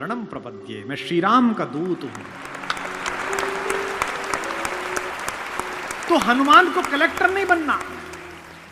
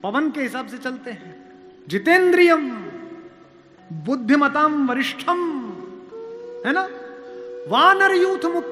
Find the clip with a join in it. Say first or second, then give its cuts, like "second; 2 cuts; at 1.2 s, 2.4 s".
first; 1 cut; at 5.4 s